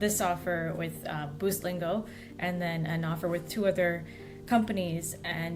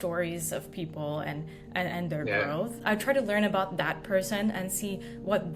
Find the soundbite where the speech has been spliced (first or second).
second